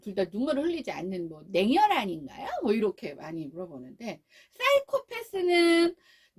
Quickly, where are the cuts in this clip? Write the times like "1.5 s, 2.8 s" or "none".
none

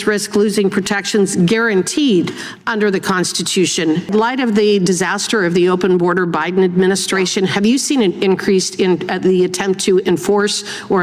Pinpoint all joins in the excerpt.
4.1 s

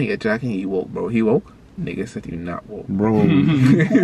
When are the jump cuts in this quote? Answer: 1.6 s

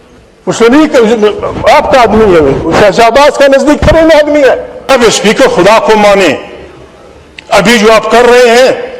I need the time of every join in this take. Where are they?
4.7 s

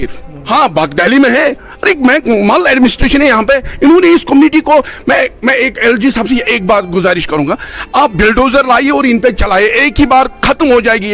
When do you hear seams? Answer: none

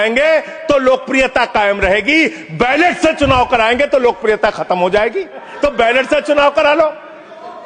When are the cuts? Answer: 5.5 s

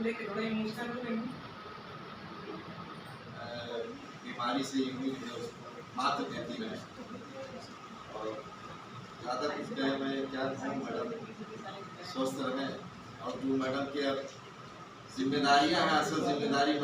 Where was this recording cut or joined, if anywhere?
3.3 s

